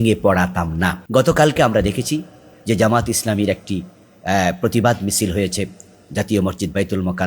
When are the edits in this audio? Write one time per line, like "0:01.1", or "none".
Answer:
0:01.0